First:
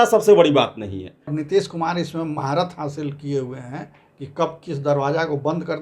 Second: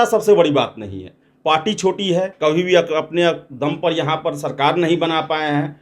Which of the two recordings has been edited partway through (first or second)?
first